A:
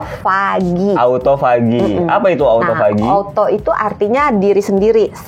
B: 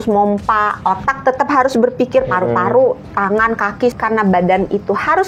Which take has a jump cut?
B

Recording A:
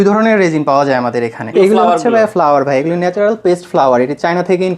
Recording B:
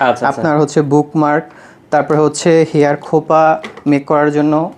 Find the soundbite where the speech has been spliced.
A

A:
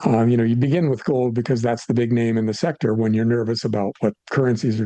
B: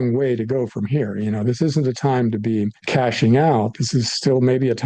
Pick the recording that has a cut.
B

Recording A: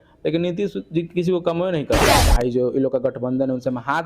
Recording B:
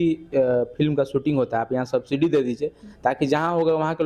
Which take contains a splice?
A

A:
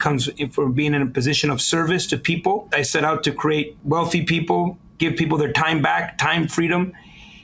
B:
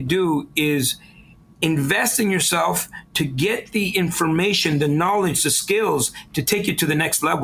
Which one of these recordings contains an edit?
A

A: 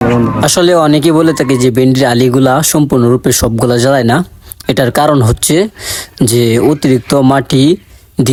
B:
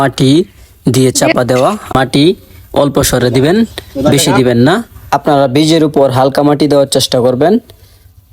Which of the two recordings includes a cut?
B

